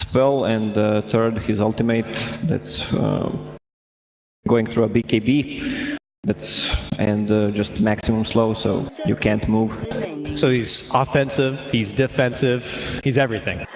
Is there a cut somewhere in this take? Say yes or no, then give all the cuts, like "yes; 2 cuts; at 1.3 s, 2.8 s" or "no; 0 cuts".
yes; 1 cut; at 3.1 s